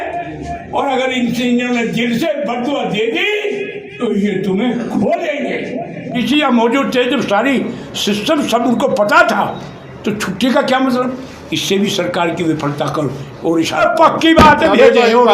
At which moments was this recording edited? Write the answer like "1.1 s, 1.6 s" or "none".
6.1 s, 13.8 s